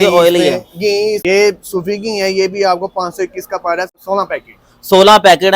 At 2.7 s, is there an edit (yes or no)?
no